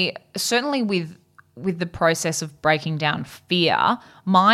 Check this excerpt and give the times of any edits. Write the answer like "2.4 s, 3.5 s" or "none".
none